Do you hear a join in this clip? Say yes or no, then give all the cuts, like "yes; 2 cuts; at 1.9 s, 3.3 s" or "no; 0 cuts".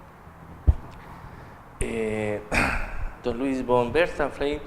yes; 1 cut; at 1.1 s